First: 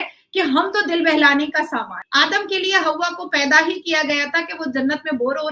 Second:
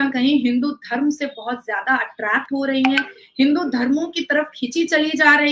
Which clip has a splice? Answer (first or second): first